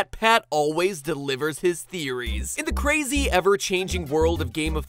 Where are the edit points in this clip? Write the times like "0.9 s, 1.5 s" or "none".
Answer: 1.7 s

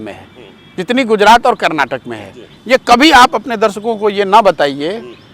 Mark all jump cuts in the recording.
none

